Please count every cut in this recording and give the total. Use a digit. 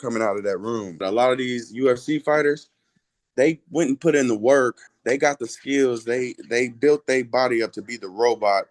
2